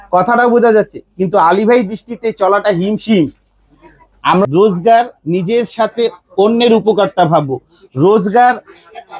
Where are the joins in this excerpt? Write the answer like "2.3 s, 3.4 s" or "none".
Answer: 4.4 s